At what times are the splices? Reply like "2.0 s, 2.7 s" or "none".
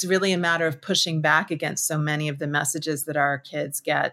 none